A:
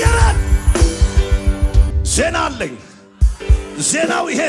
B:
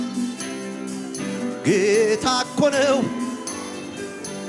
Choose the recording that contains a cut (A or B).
A